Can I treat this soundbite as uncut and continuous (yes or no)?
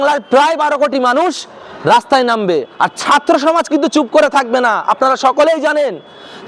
yes